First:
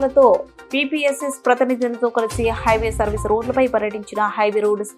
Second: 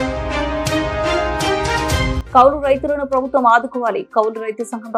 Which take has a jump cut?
second; 1 cut; at 2.2 s

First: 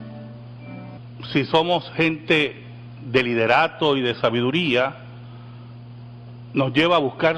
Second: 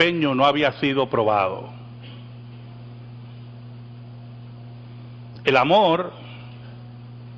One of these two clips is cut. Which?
second; 1 cut; at 4.5 s

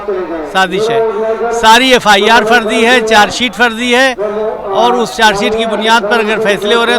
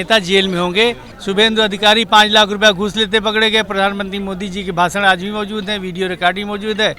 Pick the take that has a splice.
second; 1 cut; at 1.1 s

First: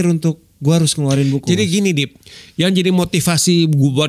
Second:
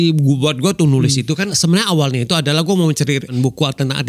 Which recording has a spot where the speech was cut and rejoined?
second; 2 cuts; at 1.5 s, 3.3 s

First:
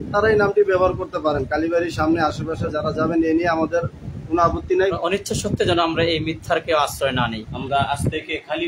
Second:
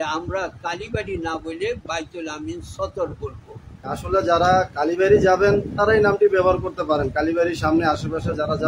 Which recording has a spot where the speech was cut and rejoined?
first; 2 cuts; at 4.9 s, 7.5 s

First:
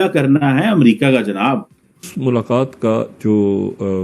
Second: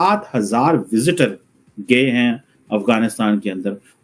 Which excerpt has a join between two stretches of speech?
first; 1 cut; at 2.1 s

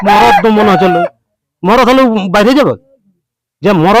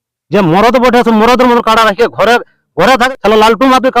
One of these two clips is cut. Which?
second; 1 cut; at 3.0 s

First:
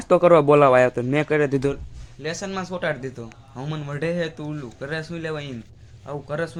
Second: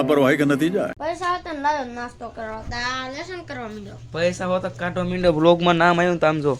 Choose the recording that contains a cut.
second; 1 cut; at 1.0 s

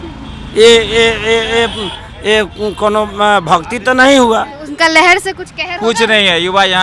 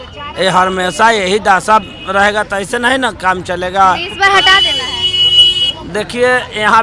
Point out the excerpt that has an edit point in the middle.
first; 1 cut; at 4.6 s

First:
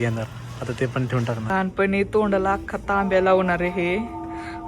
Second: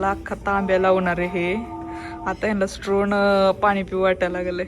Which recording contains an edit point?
first; 1 cut; at 1.5 s

